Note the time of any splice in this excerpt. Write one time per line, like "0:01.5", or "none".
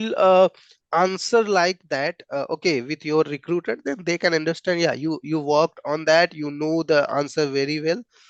none